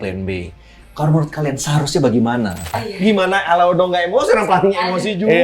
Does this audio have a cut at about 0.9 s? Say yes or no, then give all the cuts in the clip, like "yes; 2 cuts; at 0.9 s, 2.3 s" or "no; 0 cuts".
no; 1 cut; at 2.9 s